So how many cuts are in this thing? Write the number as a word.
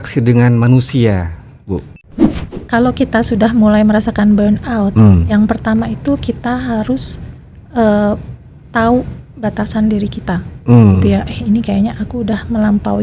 one